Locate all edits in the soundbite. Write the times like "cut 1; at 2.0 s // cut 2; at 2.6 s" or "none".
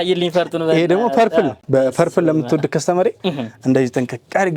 none